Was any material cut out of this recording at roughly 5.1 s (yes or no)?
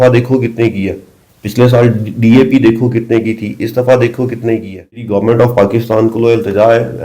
yes